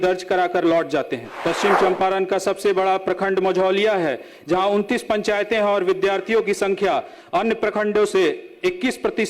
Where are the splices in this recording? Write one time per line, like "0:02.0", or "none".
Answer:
0:01.2